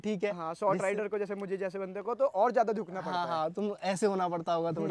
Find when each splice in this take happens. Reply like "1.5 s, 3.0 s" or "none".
none